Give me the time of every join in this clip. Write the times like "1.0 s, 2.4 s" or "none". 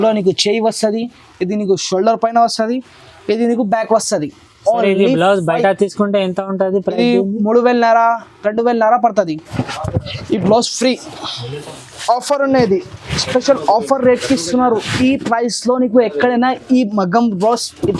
9.5 s